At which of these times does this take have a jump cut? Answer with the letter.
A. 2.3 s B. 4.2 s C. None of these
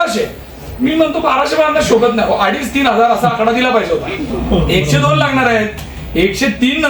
B